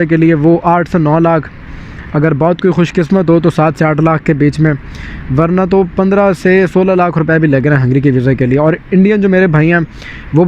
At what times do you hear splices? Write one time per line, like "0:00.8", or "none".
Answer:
none